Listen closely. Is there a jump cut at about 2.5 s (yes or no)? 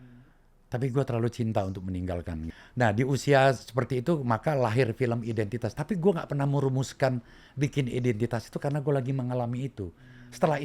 yes